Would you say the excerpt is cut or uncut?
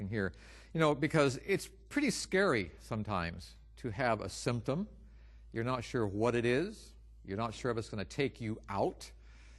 uncut